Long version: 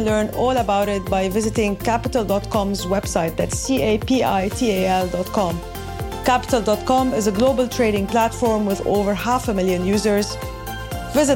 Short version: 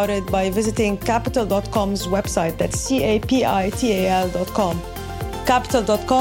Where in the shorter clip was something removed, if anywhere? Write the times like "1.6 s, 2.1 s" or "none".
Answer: none